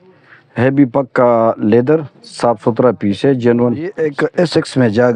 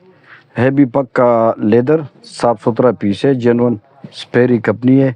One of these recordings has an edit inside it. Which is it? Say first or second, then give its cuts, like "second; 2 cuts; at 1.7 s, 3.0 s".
first; 1 cut; at 4.0 s